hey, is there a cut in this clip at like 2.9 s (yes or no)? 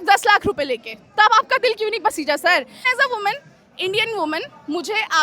yes